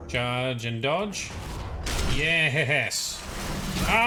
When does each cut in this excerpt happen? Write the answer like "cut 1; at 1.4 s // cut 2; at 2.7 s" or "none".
none